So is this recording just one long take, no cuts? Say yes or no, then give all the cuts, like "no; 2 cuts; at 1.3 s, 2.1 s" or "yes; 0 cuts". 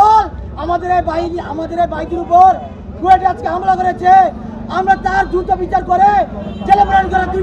yes; 0 cuts